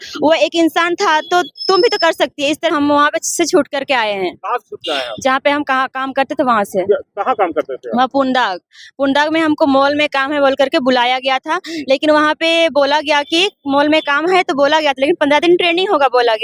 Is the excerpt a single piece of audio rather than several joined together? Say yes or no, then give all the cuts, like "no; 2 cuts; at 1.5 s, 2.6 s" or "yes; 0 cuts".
no; 1 cut; at 2.7 s